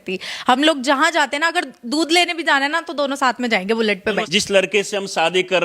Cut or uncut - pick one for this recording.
cut